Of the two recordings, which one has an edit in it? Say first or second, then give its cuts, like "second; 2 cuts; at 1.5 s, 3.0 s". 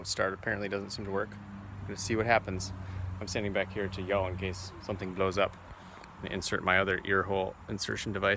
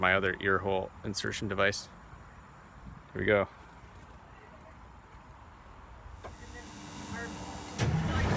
second; 1 cut; at 6.5 s